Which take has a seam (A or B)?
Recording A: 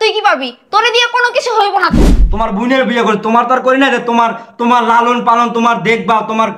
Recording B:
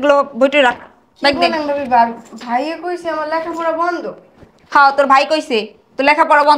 A